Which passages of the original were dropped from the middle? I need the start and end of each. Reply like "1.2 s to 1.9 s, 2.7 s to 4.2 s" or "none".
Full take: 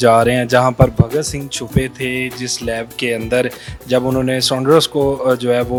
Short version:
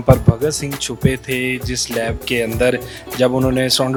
none